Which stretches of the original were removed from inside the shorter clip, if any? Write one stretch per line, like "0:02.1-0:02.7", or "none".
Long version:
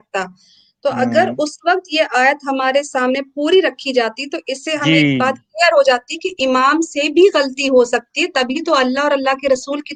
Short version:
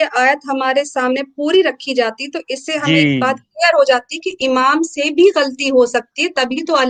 none